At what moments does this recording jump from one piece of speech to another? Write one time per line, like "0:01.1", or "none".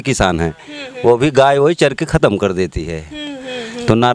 none